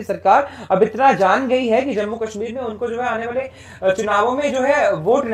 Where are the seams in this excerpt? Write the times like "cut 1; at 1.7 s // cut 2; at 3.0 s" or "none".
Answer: none

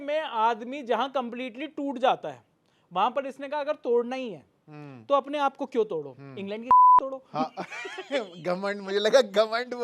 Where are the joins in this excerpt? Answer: none

